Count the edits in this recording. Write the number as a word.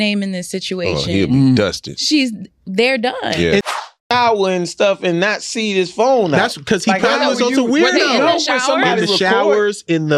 one